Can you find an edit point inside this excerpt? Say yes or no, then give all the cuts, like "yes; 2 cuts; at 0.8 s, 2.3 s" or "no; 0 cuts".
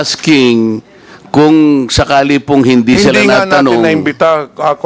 no; 0 cuts